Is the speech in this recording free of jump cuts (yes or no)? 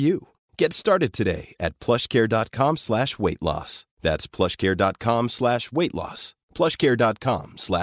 yes